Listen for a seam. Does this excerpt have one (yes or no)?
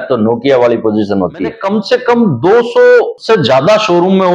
yes